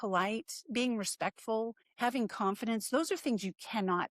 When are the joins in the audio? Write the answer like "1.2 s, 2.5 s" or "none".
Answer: 1.8 s